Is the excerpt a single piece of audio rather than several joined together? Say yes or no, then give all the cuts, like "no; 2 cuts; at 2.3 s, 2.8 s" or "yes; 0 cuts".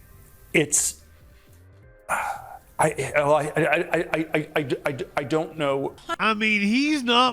no; 1 cut; at 6.1 s